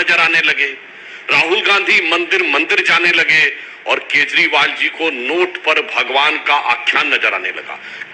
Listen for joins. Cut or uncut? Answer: uncut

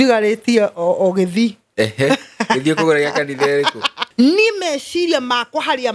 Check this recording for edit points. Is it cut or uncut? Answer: cut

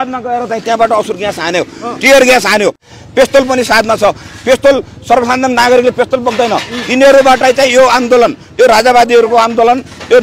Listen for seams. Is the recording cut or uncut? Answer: cut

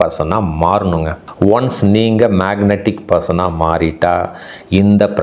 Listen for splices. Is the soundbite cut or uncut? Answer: cut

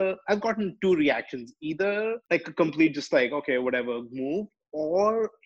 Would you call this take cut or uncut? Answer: cut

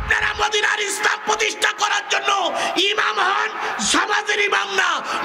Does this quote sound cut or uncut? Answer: uncut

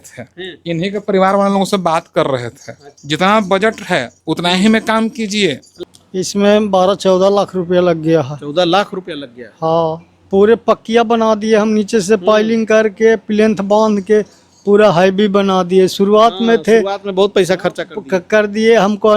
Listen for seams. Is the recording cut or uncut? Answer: cut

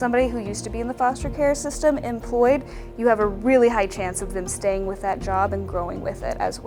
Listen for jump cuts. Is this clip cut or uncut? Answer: uncut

